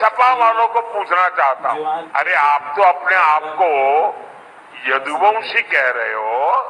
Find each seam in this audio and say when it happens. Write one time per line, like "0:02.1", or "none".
0:01.9